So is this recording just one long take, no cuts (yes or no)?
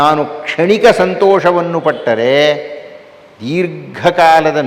yes